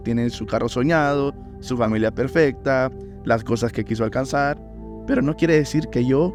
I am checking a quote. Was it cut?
no; 0 cuts

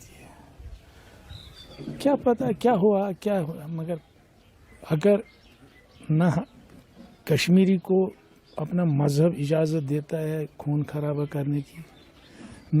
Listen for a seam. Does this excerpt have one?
no; 0 cuts

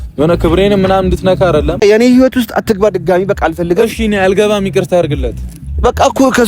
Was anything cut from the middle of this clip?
yes; 1 cut; at 1.8 s

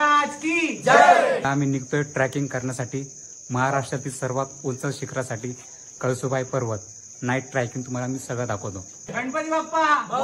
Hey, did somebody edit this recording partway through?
yes; 3 cuts; at 1.4 s, 7.0 s, 9.1 s

